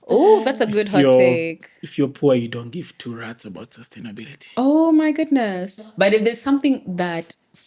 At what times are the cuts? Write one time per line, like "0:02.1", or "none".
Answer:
0:05.9